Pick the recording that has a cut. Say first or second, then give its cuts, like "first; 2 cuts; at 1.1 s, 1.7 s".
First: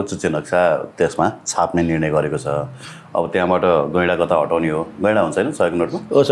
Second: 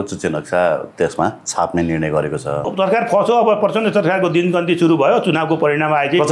second; 1 cut; at 2.7 s